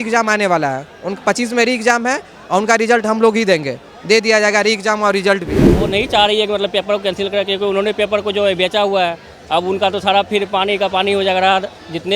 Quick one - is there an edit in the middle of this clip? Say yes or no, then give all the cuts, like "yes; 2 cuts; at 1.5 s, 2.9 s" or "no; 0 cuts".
yes; 1 cut; at 5.8 s